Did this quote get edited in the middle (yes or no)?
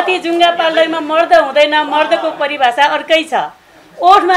no